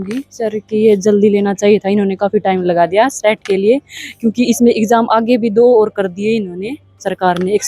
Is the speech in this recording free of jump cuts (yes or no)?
yes